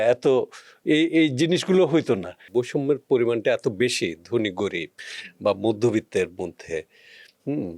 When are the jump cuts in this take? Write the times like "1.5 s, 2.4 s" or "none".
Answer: 2.4 s